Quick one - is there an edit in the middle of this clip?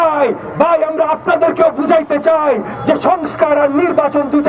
no; 0 cuts

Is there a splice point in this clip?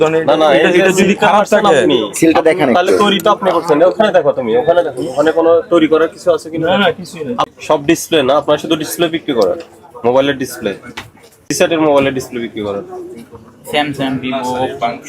yes; 2 cuts; at 7.5 s, 11.5 s

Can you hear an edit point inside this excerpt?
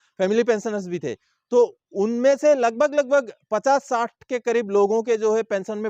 no; 0 cuts

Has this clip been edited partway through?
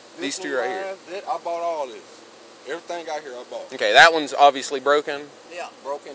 no; 0 cuts

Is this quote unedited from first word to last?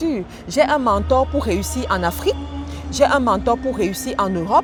yes; 0 cuts

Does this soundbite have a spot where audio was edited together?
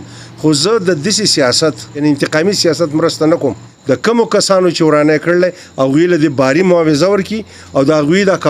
yes; 2 cuts; at 2.0 s, 3.7 s

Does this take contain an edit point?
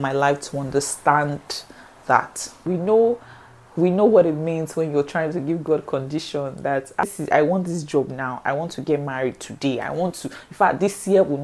yes; 2 cuts; at 2.6 s, 7.0 s

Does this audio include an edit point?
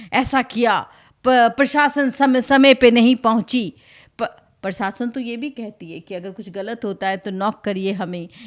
no; 0 cuts

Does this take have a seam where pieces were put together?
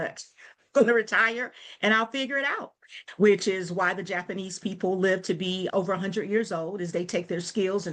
yes; 1 cut; at 2.9 s

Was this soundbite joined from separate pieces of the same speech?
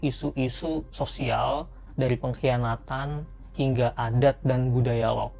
no; 0 cuts

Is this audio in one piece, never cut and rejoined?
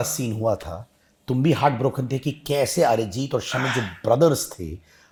yes; 0 cuts

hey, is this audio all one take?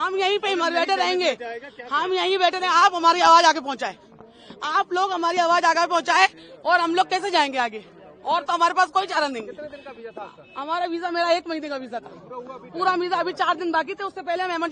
yes; 0 cuts

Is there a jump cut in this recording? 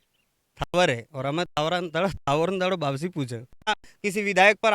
yes; 1 cut; at 3.6 s

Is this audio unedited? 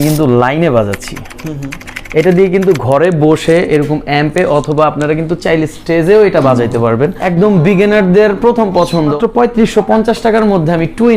no; 2 cuts; at 7.2 s, 9.1 s

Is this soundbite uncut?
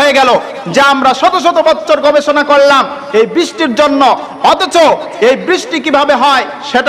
yes; 0 cuts

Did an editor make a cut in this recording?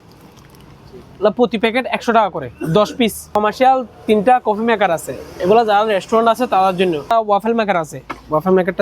yes; 2 cuts; at 3.4 s, 7.1 s

